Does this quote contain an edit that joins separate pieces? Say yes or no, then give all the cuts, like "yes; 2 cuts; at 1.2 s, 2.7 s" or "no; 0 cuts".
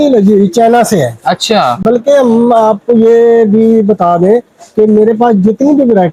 no; 0 cuts